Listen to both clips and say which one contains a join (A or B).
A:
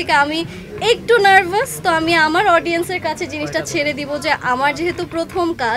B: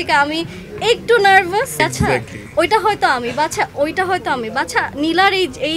B